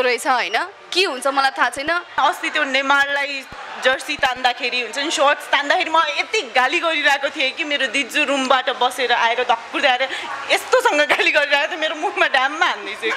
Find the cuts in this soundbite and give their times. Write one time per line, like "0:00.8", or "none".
0:02.1